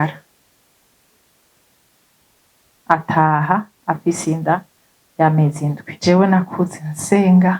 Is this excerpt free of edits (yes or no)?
no